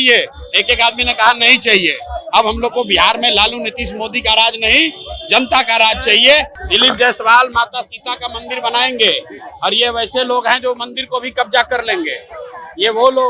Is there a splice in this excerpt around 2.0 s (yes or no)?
no